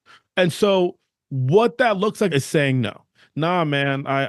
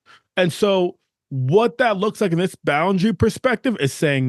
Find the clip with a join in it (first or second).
first